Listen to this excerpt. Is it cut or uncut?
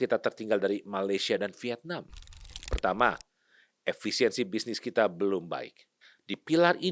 cut